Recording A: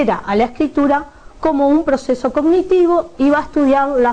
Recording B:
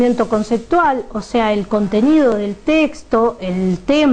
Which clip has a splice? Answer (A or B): A